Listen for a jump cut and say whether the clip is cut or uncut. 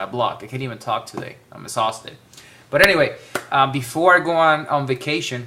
cut